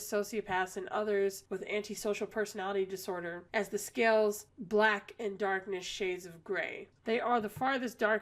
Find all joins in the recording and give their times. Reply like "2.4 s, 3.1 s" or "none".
6.8 s